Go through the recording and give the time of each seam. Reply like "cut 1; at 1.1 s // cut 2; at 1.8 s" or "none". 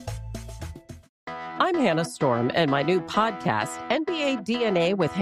cut 1; at 1.1 s